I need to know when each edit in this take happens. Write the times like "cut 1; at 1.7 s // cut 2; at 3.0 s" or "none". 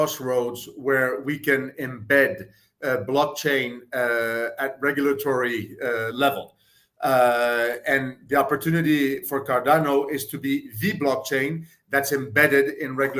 none